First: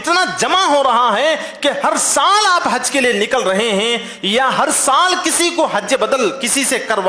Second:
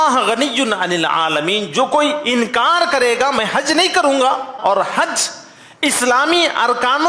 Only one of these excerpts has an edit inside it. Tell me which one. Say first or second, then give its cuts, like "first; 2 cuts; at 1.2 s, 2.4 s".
second; 1 cut; at 4.6 s